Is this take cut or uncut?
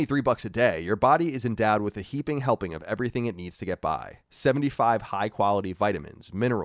uncut